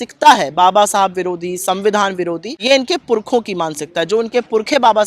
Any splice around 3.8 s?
no; 1 cut; at 2.5 s

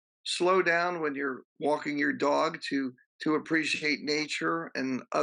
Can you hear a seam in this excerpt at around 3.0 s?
yes; 1 cut; at 3.0 s

